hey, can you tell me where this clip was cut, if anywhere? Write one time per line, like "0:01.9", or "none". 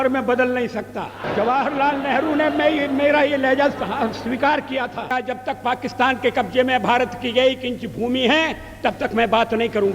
0:01.2
0:05.1